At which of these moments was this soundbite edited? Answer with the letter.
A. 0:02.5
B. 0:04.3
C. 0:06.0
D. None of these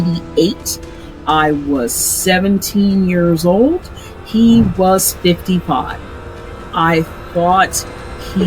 C